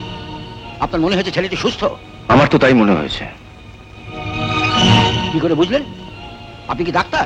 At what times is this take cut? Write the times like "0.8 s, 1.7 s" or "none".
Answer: none